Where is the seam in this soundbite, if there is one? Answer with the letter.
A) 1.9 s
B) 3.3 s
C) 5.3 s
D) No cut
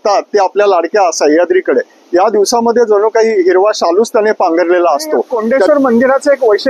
C